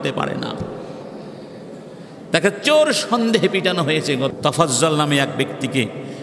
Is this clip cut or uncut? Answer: cut